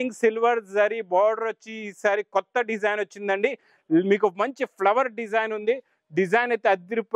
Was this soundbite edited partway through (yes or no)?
no